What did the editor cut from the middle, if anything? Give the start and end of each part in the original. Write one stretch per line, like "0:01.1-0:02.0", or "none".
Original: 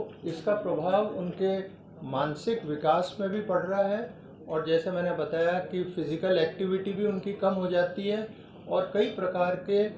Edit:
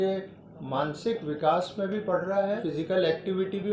0:04.0-0:06.0